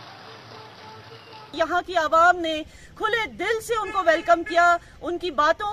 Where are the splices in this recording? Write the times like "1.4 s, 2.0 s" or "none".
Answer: 1.5 s